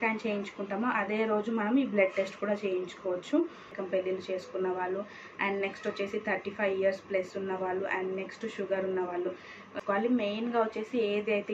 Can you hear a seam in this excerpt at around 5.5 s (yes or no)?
no